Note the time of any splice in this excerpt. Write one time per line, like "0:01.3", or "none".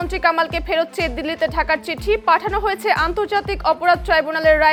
none